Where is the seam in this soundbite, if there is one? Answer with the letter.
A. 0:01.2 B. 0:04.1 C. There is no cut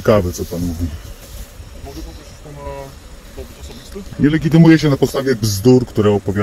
B